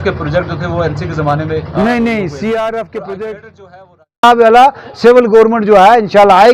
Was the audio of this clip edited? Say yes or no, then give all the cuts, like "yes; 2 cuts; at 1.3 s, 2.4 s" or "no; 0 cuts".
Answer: yes; 1 cut; at 4.2 s